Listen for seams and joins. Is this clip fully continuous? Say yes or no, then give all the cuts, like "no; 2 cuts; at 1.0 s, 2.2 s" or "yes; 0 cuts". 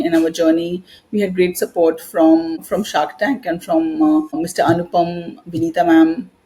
yes; 0 cuts